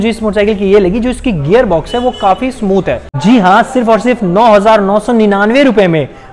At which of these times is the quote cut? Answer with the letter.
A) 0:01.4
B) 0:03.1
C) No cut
B